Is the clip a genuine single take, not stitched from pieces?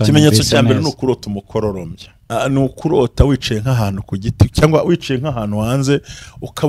no; 1 cut; at 2.2 s

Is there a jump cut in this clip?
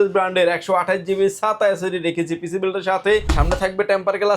yes; 1 cut; at 3.3 s

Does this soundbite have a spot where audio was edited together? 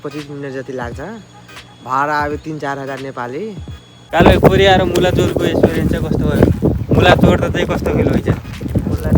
yes; 1 cut; at 4.0 s

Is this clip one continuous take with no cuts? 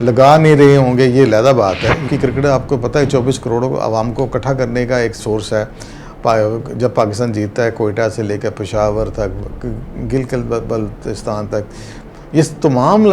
no; 1 cut; at 2.0 s

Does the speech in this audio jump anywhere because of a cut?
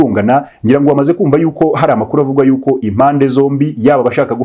no; 0 cuts

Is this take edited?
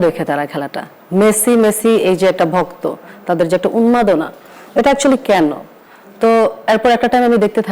no; 0 cuts

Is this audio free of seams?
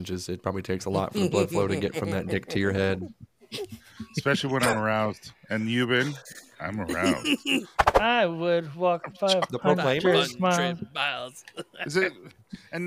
no; 1 cut; at 7.8 s

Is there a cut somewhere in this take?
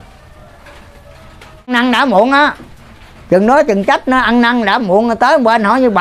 yes; 1 cut; at 1.7 s

